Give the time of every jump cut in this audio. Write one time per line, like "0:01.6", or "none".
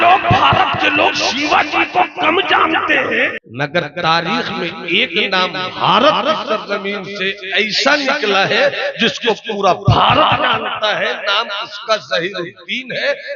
0:03.4